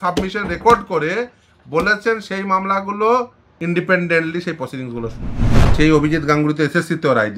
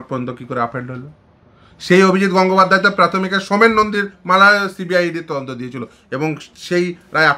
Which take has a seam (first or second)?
first